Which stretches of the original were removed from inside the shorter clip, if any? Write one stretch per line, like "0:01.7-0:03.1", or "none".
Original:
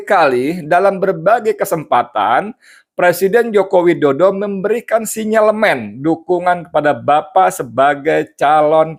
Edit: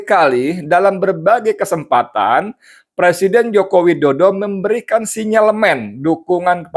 none